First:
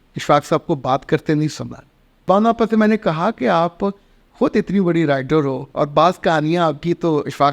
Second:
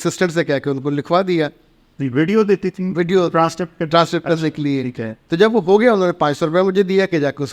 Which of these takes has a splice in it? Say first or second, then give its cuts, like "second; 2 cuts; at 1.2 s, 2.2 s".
first; 2 cuts; at 2.2 s, 5.6 s